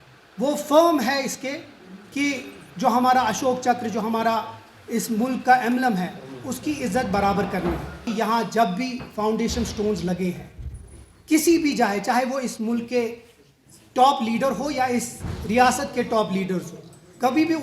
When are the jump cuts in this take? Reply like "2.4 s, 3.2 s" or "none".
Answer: 8.0 s